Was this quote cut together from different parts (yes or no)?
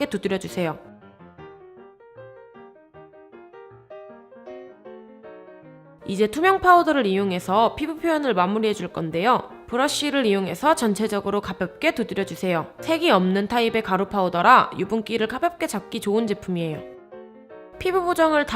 yes